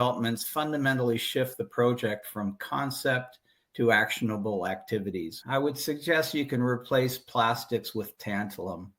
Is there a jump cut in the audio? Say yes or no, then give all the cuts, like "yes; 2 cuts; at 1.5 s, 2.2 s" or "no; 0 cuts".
yes; 1 cut; at 5.4 s